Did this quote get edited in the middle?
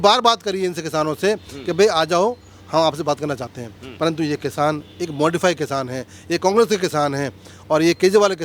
no; 0 cuts

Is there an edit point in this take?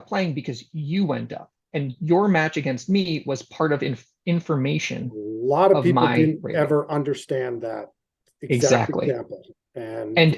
no; 0 cuts

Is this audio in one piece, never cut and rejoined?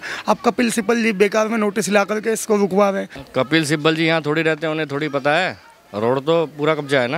no; 1 cut; at 3.1 s

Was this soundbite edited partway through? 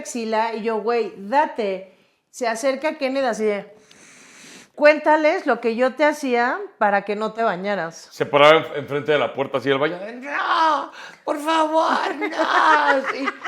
yes; 1 cut; at 4.6 s

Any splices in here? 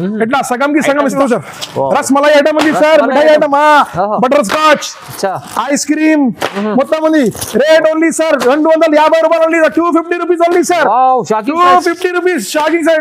yes; 1 cut; at 1.2 s

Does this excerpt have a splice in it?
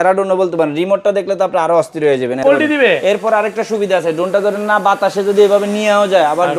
yes; 1 cut; at 2.4 s

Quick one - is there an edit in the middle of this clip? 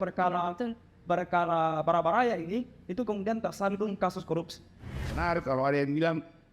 yes; 1 cut; at 5.1 s

